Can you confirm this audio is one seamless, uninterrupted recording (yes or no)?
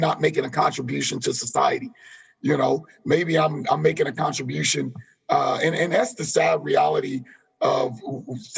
yes